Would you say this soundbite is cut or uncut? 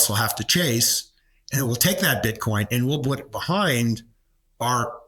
uncut